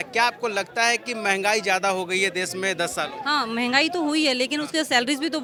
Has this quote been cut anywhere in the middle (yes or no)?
no